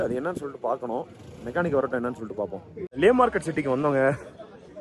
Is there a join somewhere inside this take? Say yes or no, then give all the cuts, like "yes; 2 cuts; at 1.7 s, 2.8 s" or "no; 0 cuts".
yes; 1 cut; at 2.9 s